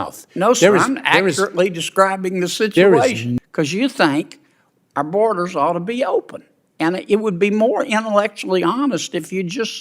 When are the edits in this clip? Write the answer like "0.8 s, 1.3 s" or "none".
3.3 s